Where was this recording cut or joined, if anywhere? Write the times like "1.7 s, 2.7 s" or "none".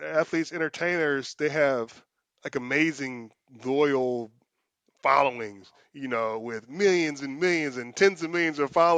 none

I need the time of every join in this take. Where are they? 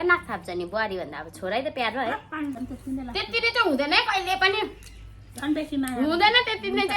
2.6 s

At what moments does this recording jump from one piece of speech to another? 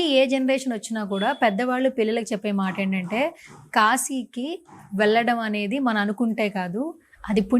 none

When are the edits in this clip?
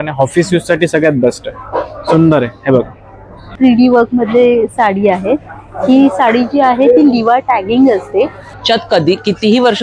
3.5 s, 8.5 s

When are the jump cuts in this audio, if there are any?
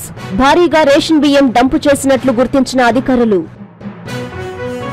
3.5 s

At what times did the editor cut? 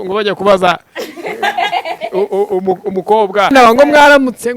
3.5 s

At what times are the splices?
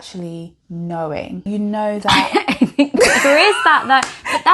1.4 s

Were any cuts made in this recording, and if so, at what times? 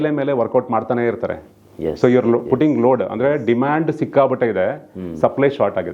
none

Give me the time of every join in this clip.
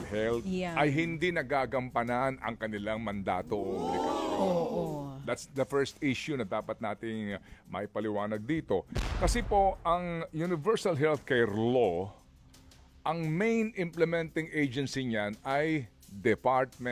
none

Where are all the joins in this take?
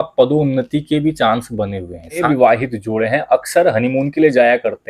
2.2 s

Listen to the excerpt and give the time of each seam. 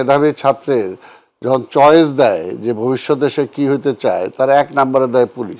none

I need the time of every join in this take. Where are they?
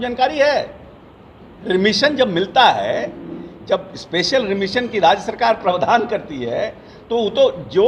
none

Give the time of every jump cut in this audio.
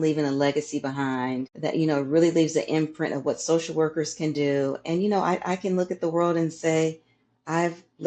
1.5 s

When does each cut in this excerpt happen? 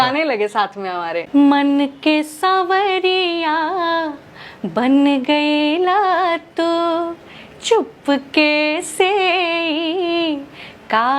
1.3 s

